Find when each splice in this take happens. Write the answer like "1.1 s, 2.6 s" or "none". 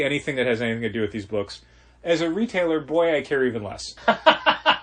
3.9 s